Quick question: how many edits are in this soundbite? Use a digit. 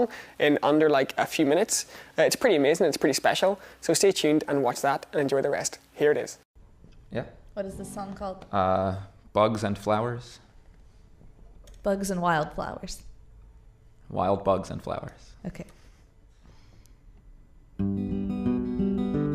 1